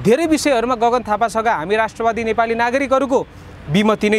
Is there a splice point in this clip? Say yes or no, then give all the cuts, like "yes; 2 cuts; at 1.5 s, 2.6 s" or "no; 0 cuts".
no; 0 cuts